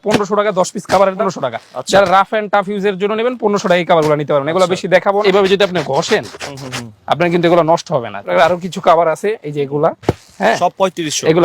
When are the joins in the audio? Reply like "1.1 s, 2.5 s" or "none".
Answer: 1.2 s, 5.2 s, 8.2 s